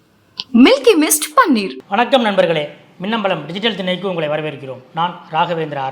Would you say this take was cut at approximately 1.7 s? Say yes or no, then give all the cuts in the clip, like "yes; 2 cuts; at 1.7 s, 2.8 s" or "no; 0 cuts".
yes; 1 cut; at 1.7 s